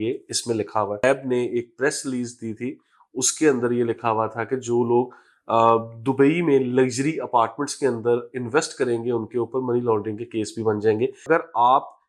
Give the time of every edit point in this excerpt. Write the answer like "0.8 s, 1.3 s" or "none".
1.0 s, 11.2 s